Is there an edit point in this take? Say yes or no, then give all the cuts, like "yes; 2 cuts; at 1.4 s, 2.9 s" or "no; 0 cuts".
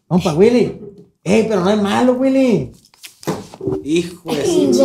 no; 0 cuts